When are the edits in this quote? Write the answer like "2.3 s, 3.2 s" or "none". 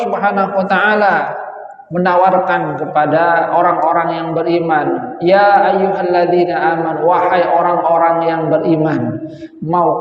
none